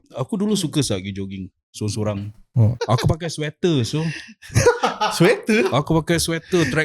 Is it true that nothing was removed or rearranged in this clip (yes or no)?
no